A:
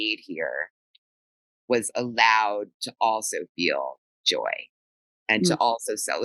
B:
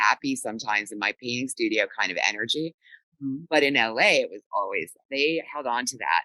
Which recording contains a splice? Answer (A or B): B